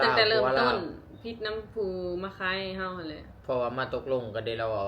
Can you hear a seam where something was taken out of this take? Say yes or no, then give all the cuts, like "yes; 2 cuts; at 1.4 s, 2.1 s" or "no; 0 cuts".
yes; 1 cut; at 3.3 s